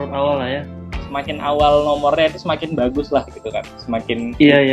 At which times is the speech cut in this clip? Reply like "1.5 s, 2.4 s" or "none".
none